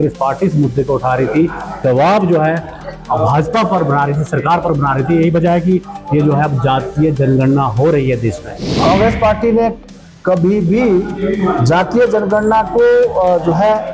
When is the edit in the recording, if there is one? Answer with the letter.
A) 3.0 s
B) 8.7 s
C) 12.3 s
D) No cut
B